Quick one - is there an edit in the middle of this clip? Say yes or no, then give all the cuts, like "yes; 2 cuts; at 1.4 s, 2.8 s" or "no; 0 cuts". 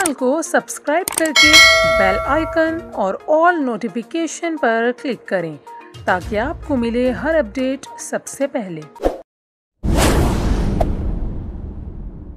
no; 0 cuts